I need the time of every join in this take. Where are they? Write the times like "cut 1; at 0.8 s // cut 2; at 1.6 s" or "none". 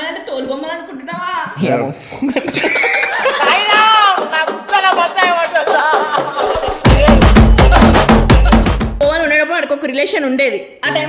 cut 1; at 9.0 s